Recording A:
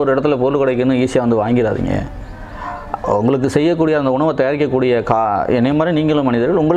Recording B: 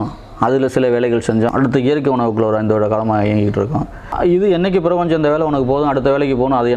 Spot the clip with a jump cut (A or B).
B